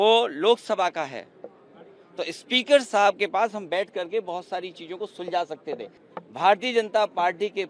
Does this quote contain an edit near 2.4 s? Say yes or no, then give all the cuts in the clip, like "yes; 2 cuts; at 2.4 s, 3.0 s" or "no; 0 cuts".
no; 1 cut; at 6.0 s